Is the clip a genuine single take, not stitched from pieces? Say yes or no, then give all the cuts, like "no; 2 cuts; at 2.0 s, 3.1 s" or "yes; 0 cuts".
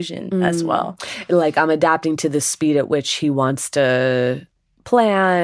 yes; 0 cuts